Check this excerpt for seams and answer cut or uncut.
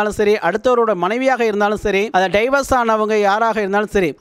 uncut